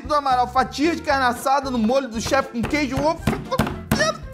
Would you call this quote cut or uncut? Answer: uncut